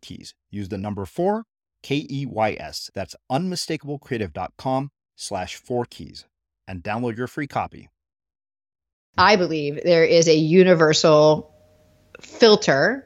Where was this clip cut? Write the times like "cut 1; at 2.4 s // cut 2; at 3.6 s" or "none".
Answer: cut 1; at 9.1 s